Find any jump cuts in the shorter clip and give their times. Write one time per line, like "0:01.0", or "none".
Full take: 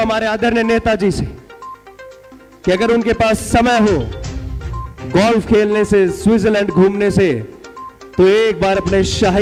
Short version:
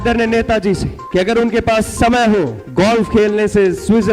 0:00.9
0:02.6